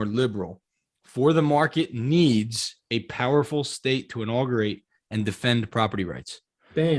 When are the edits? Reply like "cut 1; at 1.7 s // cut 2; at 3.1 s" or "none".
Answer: none